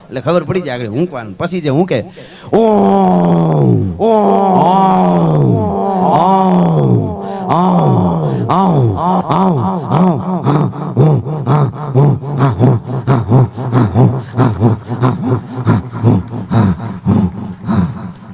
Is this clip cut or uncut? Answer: uncut